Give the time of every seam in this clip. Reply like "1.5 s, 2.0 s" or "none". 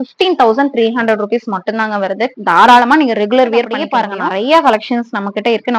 3.8 s